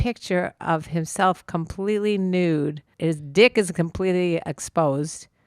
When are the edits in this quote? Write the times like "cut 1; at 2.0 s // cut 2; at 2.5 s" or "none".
cut 1; at 2.9 s